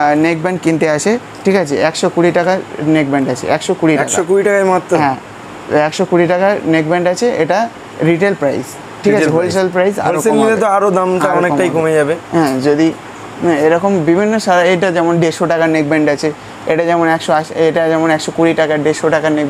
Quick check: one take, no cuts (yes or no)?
yes